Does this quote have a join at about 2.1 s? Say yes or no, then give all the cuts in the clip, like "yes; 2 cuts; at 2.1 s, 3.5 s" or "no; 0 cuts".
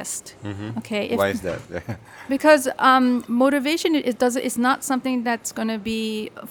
no; 0 cuts